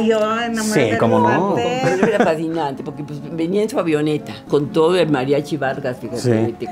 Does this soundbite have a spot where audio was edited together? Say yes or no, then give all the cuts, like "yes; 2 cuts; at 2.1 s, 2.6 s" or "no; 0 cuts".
yes; 1 cut; at 4.4 s